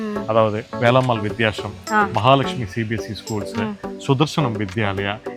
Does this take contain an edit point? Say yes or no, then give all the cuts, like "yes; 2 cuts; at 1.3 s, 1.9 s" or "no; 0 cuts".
no; 0 cuts